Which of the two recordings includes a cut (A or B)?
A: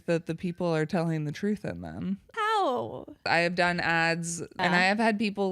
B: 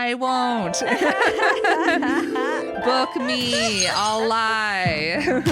A